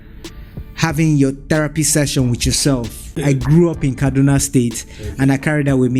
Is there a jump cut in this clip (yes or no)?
yes